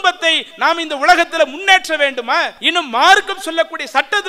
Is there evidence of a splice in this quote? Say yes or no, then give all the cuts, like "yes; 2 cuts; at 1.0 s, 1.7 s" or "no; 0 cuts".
yes; 1 cut; at 2.6 s